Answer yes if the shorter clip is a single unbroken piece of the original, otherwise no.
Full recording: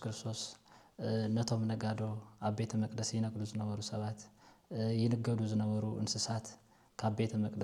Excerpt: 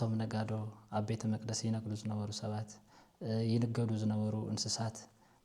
yes